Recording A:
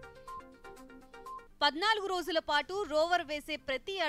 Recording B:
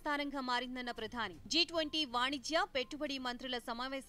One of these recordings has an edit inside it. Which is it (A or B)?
A